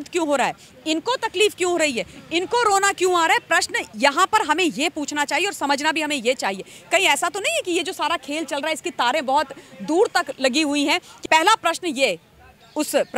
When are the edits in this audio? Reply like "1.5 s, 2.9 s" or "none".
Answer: 11.1 s